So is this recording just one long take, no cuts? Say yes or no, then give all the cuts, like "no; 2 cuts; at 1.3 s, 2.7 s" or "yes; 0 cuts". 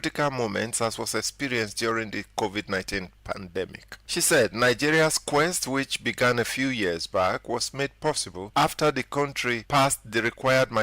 no; 2 cuts; at 8.3 s, 9.6 s